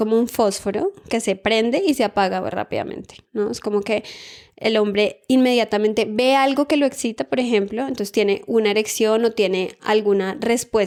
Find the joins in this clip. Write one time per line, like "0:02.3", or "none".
none